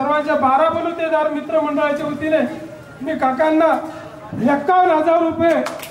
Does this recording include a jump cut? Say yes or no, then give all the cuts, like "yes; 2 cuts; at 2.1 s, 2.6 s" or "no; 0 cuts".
no; 0 cuts